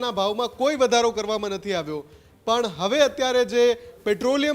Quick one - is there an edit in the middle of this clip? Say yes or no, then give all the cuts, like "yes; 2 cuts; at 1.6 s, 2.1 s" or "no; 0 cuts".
no; 0 cuts